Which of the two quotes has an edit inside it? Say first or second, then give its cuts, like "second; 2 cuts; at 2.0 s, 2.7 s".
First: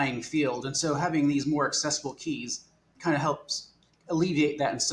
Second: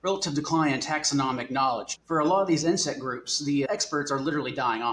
second; 2 cuts; at 1.9 s, 3.7 s